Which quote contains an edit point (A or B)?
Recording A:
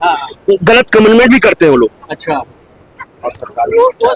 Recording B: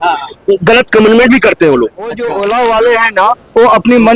B